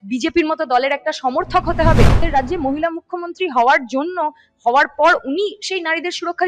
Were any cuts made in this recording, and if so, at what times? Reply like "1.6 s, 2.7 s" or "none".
2.2 s

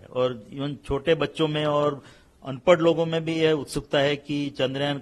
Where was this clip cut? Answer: none

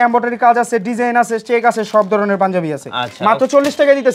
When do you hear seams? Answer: none

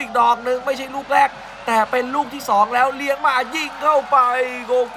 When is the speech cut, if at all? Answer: none

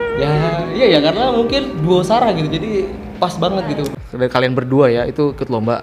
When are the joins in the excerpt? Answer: 3.9 s

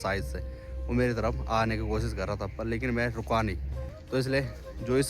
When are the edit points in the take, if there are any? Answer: 3.9 s

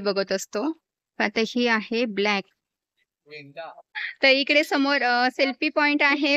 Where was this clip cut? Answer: 3.9 s

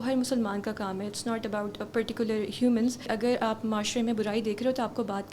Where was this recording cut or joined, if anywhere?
3.1 s

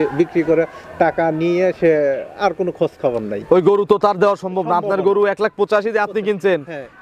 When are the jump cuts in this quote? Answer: none

